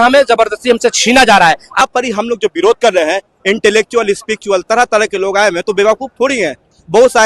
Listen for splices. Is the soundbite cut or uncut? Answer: cut